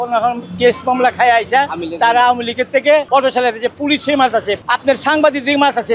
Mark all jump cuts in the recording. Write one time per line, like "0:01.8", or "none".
0:03.1
0:04.6